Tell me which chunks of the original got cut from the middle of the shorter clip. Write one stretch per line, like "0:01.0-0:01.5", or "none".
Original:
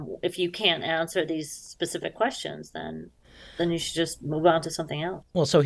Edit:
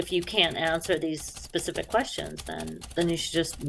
0:03.0-0:03.4